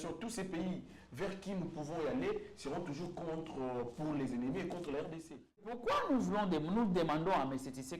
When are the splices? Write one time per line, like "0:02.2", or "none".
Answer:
0:05.8